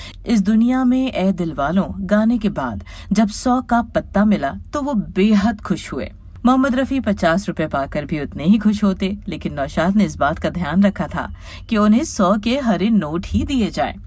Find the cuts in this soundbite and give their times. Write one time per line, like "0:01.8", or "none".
none